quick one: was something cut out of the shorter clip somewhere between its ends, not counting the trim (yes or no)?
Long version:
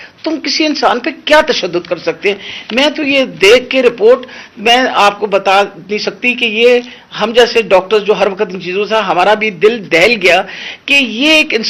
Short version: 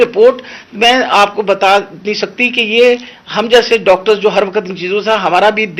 no